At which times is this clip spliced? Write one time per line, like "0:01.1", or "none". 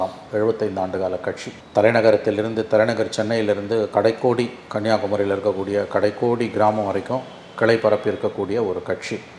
none